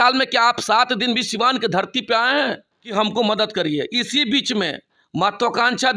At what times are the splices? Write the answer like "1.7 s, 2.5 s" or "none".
2.9 s